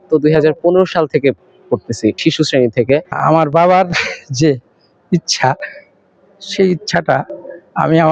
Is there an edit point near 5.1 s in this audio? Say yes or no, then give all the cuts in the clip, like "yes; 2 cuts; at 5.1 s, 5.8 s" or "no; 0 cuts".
no; 1 cut; at 3.2 s